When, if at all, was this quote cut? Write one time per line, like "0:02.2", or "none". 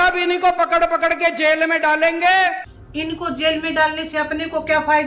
none